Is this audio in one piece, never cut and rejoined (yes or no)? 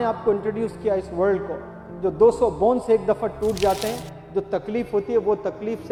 yes